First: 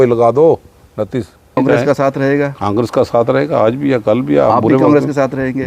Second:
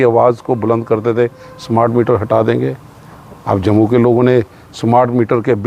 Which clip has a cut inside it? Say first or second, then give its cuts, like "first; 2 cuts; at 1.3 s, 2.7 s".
first; 1 cut; at 1.6 s